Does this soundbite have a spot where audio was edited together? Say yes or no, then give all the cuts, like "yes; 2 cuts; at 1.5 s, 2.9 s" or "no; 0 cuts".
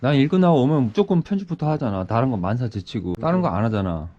yes; 1 cut; at 3.2 s